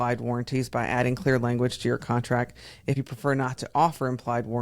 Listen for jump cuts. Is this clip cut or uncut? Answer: cut